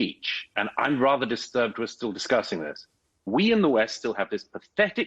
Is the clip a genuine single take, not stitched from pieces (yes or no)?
no